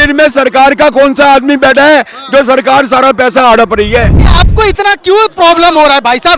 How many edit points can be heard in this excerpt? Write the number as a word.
one